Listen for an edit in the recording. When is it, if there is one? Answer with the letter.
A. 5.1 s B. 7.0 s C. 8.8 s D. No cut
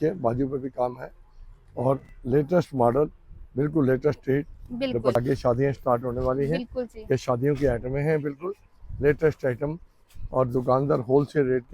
A